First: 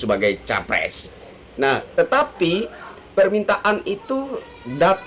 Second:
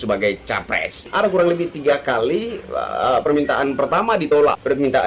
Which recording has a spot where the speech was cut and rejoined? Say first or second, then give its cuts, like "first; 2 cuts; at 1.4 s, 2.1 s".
second; 2 cuts; at 1.0 s, 4.3 s